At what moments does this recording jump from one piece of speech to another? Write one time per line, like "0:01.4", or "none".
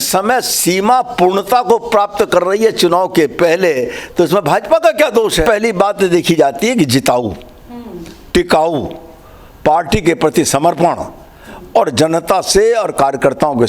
0:05.4